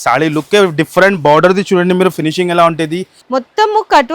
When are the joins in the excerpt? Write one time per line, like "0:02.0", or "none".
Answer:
0:03.2